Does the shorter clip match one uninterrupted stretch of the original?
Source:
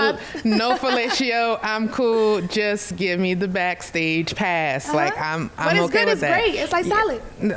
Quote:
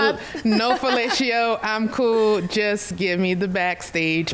yes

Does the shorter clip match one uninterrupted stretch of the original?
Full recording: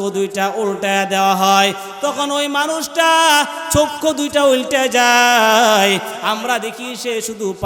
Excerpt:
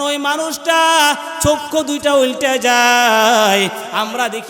yes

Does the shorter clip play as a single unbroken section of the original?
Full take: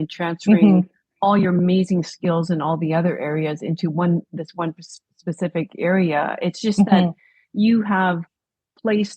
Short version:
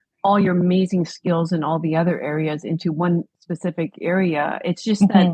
no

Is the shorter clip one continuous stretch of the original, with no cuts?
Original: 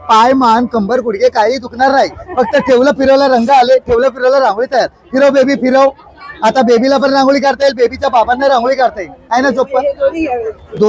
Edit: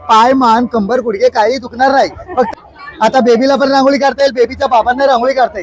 no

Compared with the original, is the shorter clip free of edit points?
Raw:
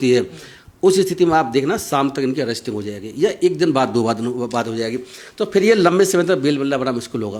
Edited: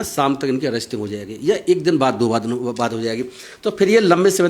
yes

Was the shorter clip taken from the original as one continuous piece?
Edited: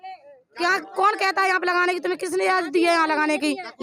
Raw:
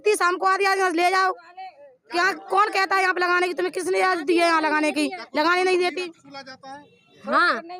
yes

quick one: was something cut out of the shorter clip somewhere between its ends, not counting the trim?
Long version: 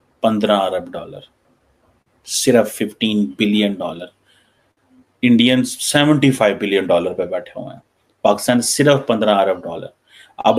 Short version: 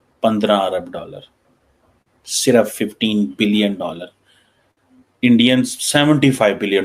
no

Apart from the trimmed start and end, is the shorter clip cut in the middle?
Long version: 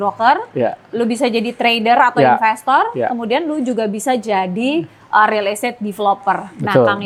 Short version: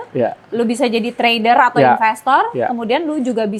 no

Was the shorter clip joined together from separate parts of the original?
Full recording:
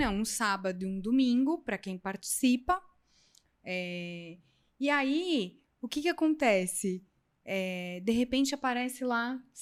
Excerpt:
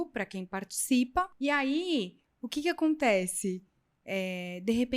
yes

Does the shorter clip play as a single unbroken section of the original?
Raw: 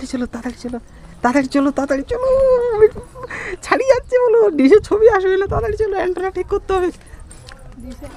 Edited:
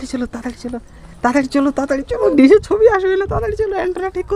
no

